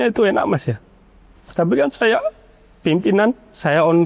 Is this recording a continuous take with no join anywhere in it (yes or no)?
yes